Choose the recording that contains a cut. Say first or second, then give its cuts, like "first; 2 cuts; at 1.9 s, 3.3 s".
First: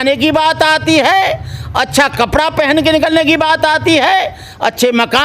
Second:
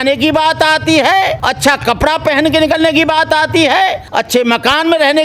second; 2 cuts; at 1.4 s, 4.0 s